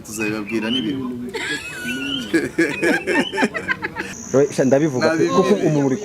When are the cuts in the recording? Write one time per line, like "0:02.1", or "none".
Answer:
0:04.1